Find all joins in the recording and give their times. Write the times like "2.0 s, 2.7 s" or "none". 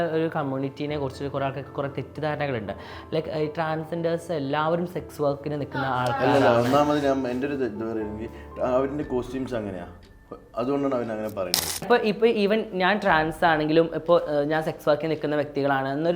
11.8 s